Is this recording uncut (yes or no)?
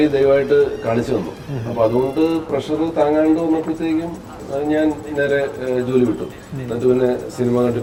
yes